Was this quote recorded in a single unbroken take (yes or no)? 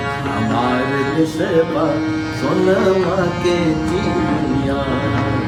yes